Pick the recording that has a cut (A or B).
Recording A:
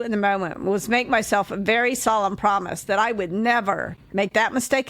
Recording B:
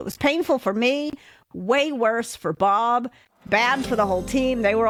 A